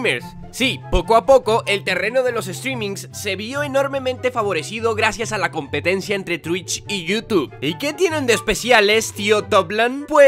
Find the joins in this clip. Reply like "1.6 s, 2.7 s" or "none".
5.0 s